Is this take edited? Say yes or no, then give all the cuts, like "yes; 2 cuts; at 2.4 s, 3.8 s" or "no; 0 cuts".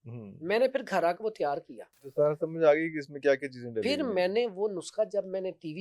no; 0 cuts